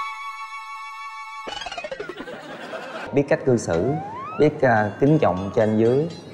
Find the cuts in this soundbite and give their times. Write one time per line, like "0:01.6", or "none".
0:03.1